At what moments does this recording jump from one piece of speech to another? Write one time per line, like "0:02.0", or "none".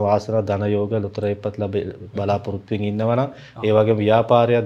none